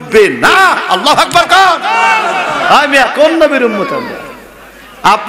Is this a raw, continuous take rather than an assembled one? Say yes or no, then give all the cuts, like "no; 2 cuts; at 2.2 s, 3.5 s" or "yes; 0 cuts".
yes; 0 cuts